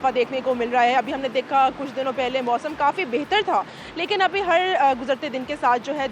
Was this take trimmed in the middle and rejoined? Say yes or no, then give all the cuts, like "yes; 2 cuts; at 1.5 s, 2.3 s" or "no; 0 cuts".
no; 0 cuts